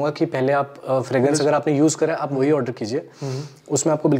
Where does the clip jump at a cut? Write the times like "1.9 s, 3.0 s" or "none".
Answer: none